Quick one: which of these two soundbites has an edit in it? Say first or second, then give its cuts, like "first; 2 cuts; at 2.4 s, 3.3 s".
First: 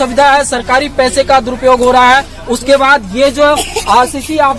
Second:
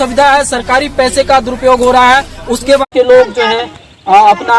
second; 1 cut; at 2.9 s